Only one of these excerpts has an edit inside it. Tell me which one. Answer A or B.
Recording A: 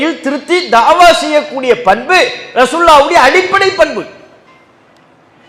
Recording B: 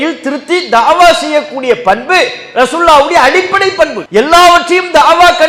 B